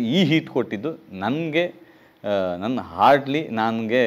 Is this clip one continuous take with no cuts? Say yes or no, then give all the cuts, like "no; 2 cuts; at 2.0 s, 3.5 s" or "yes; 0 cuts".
yes; 0 cuts